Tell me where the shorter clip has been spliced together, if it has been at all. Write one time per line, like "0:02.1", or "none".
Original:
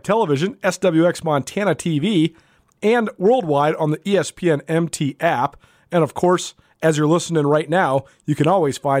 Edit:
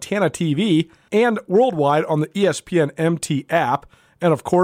0:01.0